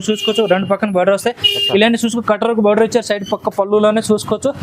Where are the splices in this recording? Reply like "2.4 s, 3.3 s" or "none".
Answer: none

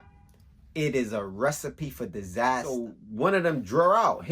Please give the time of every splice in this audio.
2.7 s

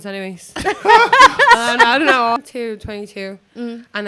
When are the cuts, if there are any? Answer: 2.4 s

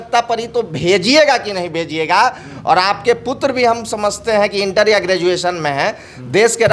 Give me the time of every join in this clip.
none

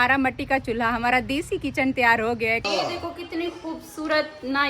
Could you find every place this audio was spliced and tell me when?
2.6 s

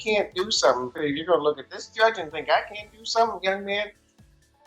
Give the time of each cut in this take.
0.9 s

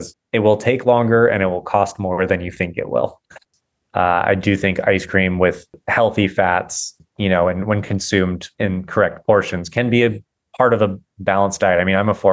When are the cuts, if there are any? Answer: 3.3 s, 5.8 s, 6.9 s, 8.5 s

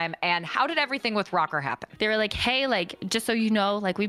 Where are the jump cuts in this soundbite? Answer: 1.9 s, 3.0 s

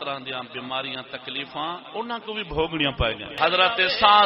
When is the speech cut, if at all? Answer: 1.8 s, 3.3 s

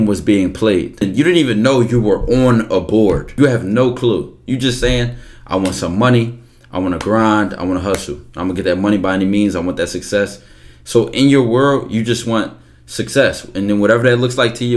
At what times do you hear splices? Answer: 1.0 s, 3.3 s

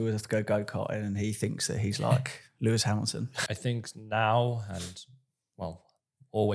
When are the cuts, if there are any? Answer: 3.3 s

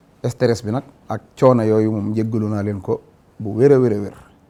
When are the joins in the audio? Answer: none

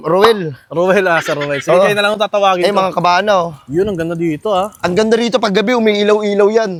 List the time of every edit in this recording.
none

